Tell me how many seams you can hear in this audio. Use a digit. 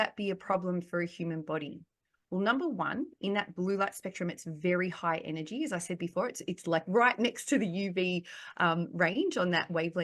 0